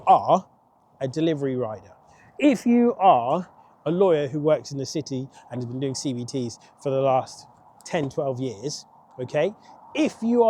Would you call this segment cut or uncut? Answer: uncut